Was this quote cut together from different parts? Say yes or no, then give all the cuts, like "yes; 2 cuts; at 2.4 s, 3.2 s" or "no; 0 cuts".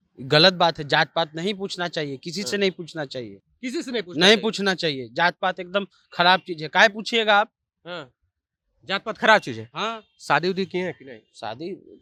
no; 0 cuts